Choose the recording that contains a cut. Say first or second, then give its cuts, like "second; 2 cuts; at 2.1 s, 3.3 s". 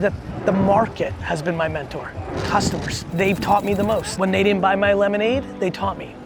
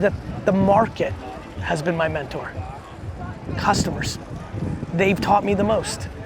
first; 4 cuts; at 1.2 s, 2.3 s, 3.0 s, 4.1 s